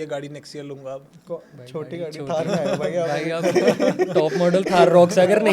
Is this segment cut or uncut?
uncut